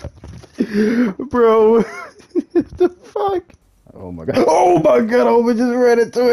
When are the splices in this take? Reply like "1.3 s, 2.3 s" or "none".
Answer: 3.6 s